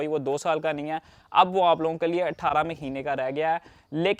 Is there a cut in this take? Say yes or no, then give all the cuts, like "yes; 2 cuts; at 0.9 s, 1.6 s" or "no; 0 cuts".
no; 0 cuts